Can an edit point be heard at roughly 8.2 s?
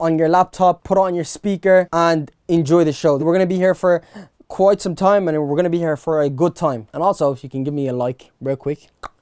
no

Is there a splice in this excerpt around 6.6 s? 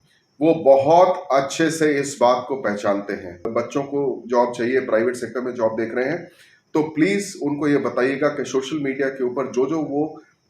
no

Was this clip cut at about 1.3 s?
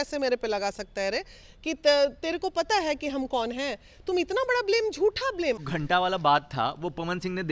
no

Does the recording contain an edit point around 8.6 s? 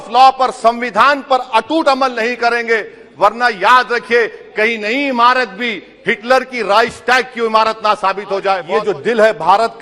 yes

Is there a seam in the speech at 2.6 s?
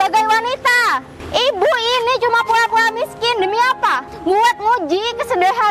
no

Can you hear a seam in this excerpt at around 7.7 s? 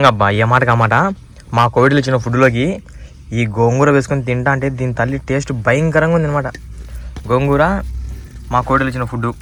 no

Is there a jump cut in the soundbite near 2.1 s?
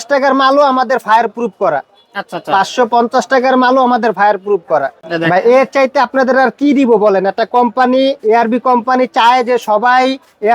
no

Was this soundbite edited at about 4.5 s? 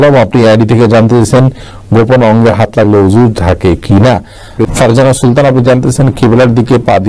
yes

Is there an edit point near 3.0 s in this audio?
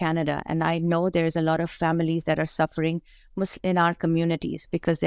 no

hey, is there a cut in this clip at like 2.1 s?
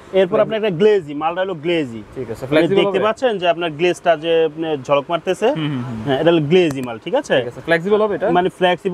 no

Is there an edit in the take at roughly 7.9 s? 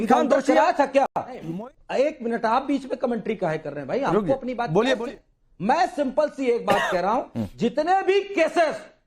no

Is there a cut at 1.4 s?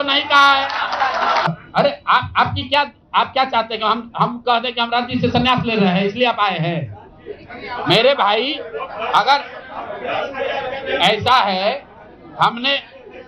yes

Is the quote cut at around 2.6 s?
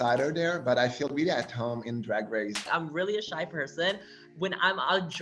yes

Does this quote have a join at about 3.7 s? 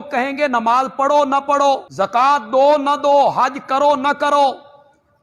no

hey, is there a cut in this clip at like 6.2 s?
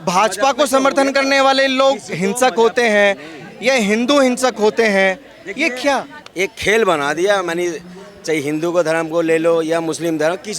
yes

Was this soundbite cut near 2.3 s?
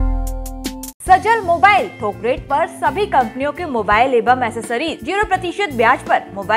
no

